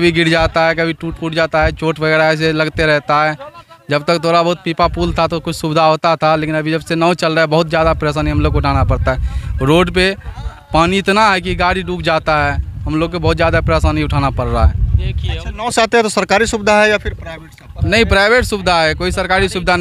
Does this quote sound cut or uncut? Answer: uncut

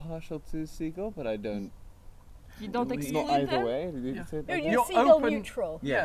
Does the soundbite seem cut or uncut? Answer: uncut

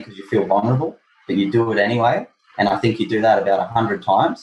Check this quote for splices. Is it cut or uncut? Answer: uncut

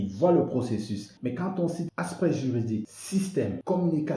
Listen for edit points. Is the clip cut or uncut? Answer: cut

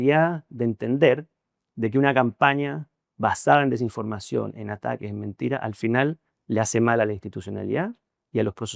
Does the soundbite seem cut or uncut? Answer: uncut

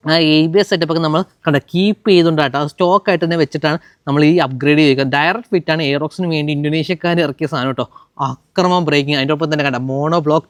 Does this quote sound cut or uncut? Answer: uncut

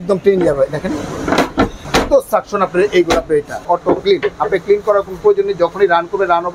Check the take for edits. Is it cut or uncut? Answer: cut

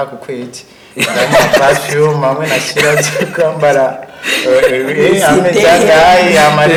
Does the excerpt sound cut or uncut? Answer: uncut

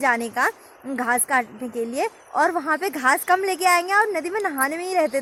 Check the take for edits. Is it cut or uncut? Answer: uncut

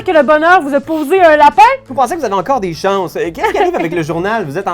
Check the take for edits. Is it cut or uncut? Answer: cut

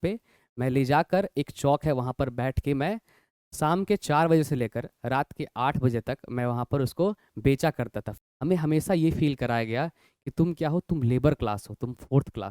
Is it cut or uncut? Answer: cut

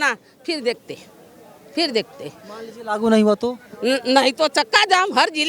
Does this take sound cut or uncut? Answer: uncut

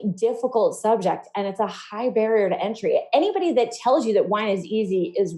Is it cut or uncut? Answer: uncut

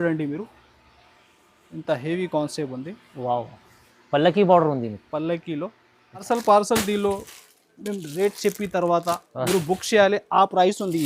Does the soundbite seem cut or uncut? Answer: cut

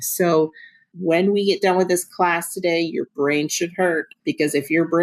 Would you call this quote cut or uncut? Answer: cut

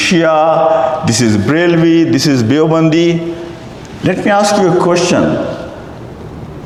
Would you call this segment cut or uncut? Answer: uncut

